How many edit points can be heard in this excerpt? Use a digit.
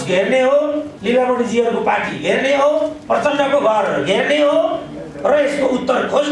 2